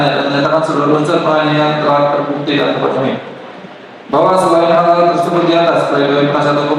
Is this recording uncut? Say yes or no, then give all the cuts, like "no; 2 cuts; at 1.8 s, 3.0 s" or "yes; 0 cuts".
yes; 0 cuts